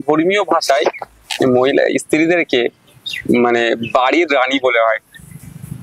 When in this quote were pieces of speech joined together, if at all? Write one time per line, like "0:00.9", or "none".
none